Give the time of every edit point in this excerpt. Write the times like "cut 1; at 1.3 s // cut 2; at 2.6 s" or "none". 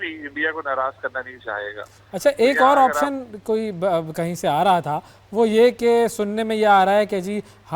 none